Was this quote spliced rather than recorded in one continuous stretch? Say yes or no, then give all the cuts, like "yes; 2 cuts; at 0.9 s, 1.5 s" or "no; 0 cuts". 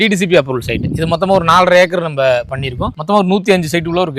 yes; 1 cut; at 2.9 s